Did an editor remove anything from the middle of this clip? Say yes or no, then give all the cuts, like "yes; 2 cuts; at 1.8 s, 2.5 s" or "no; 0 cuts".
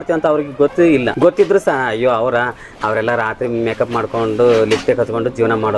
yes; 1 cut; at 1.0 s